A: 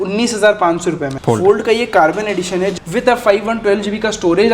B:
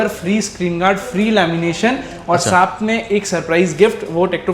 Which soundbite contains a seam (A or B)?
A